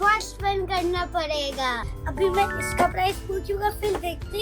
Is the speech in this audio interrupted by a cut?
yes; 1 cut; at 2.0 s

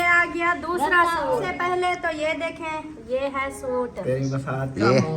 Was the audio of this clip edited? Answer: yes; 1 cut; at 1.5 s

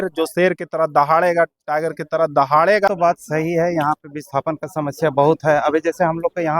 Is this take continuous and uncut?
no; 1 cut; at 2.9 s

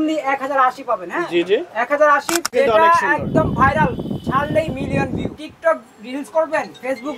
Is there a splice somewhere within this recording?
yes; 2 cuts; at 2.5 s, 5.4 s

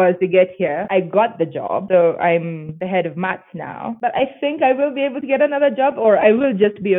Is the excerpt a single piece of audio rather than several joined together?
no; 3 cuts; at 1.2 s, 2.7 s, 3.9 s

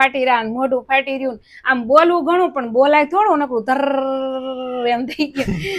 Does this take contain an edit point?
no; 0 cuts

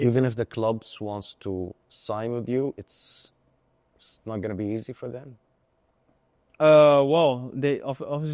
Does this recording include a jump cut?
no; 0 cuts

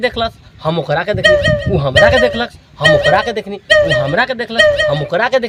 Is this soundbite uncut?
yes; 0 cuts

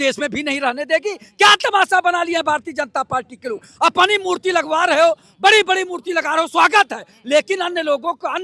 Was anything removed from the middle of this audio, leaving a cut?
no; 0 cuts

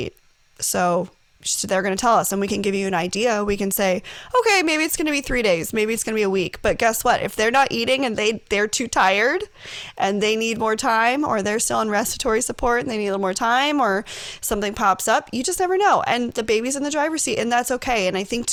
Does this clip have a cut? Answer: no; 0 cuts

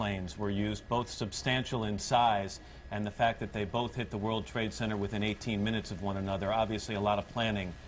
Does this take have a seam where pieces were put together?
yes; 1 cut; at 6.9 s

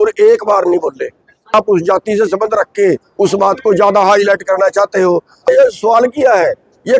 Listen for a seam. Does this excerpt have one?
yes; 2 cuts; at 1.5 s, 5.5 s

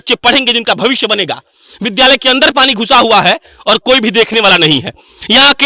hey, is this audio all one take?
yes; 0 cuts

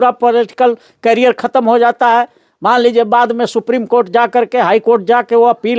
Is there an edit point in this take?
no; 0 cuts

